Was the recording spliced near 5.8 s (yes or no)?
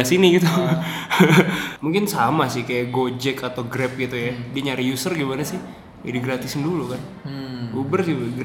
no